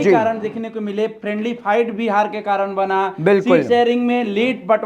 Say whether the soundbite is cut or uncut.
uncut